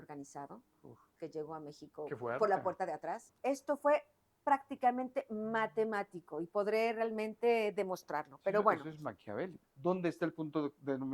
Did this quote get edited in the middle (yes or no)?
yes